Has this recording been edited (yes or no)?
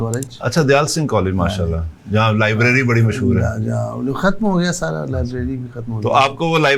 no